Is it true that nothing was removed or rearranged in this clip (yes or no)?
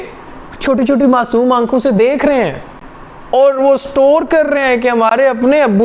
yes